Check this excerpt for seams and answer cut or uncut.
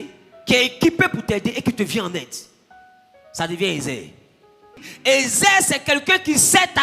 cut